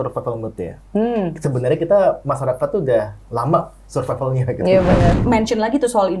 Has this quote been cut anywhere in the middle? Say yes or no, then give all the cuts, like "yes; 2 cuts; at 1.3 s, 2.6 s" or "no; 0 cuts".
yes; 1 cut; at 5.2 s